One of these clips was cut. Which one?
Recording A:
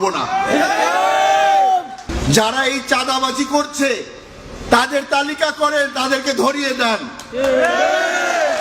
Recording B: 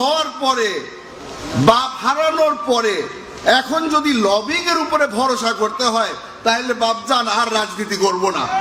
A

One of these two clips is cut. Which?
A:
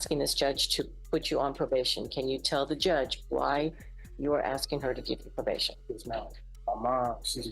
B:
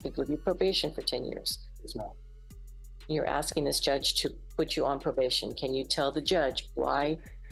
A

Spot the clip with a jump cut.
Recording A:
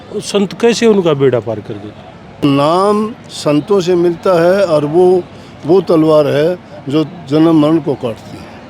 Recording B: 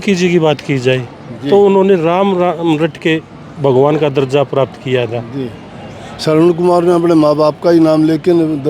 A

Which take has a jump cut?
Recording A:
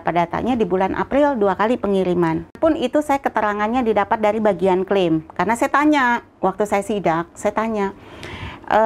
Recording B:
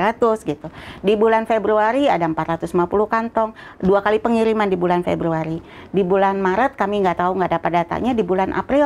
A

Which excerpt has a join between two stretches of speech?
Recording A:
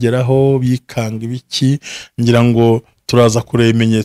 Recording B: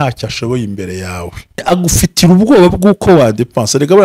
B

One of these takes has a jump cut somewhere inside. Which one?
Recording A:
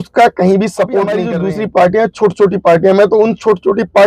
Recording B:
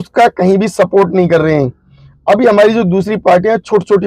A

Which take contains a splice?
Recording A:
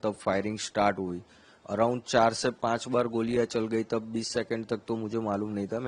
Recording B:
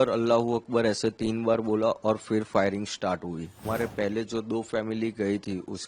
B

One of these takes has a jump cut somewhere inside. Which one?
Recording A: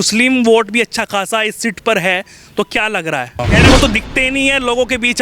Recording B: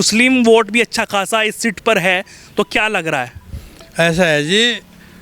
A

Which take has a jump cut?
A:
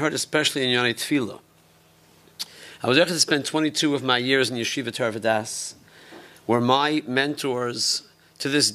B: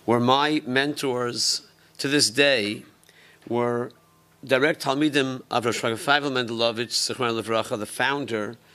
B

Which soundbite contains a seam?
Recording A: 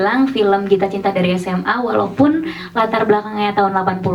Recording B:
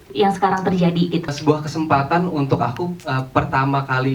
B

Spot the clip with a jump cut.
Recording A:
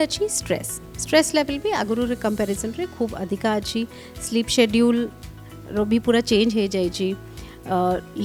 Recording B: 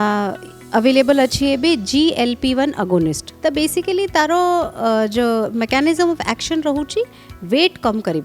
B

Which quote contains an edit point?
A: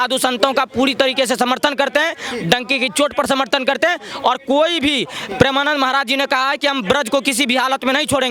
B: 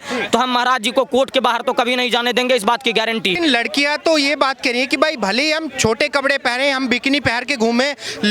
B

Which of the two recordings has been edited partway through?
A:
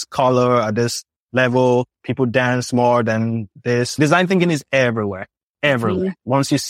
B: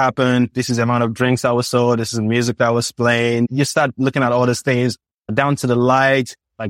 A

